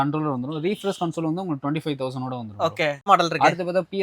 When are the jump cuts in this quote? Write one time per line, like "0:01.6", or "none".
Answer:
0:03.1